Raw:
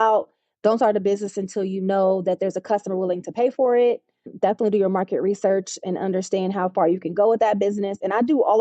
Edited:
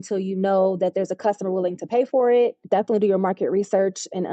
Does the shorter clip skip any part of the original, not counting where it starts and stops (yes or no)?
yes